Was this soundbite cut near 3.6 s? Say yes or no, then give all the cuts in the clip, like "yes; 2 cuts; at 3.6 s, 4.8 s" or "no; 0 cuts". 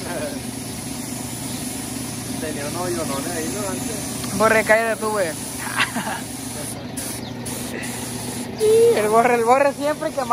no; 0 cuts